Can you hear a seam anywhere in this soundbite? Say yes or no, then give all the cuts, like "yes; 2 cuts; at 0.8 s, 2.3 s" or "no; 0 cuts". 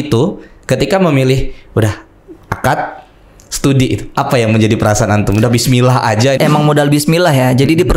yes; 1 cut; at 6.4 s